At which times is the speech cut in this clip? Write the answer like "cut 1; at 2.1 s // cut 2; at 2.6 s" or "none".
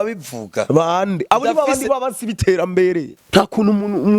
cut 1; at 3.1 s